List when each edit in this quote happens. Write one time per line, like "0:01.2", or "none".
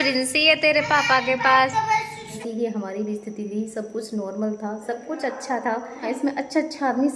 0:02.4
0:06.1